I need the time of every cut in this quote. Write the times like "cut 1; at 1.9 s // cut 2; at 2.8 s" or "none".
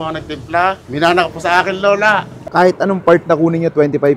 cut 1; at 2.3 s

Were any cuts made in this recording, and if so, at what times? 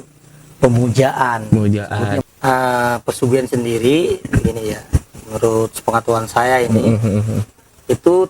cut 1; at 2.3 s

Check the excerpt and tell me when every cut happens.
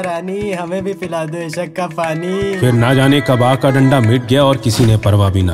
none

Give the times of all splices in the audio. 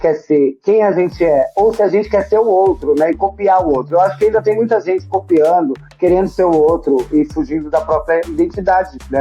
cut 1; at 8.3 s

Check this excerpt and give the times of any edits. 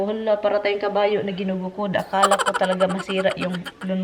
none

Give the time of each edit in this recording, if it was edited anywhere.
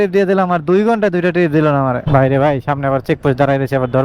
cut 1; at 2.0 s

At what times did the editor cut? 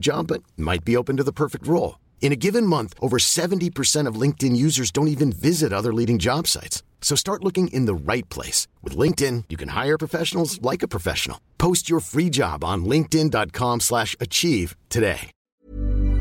cut 1; at 15.3 s

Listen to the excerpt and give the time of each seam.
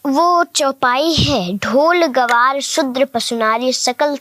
none

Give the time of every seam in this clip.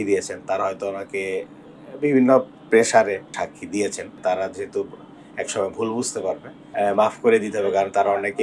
cut 1; at 3.4 s // cut 2; at 4.1 s // cut 3; at 6.6 s

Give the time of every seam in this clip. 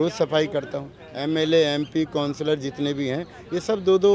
cut 1; at 1.1 s

